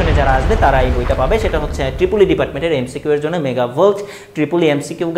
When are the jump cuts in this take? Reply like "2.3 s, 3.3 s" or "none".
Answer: none